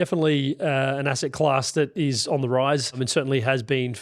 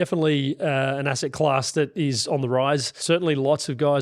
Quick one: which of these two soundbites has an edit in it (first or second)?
second